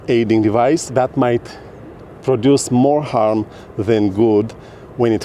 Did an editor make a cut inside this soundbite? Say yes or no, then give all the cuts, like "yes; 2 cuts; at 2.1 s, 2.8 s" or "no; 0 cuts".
no; 0 cuts